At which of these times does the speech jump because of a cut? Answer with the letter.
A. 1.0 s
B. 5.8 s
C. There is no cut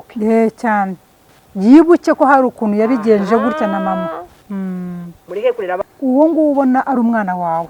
B